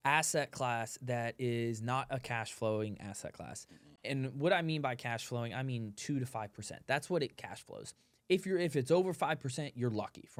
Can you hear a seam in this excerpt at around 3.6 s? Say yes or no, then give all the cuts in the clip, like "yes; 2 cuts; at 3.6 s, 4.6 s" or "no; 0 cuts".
no; 0 cuts